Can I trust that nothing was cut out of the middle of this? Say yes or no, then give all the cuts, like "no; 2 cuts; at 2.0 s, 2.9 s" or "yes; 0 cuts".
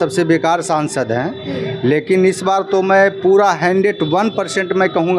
yes; 0 cuts